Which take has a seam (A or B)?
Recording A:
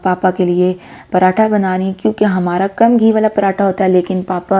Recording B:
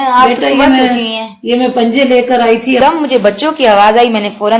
B